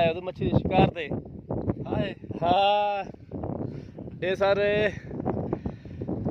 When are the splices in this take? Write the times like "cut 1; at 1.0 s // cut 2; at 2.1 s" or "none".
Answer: none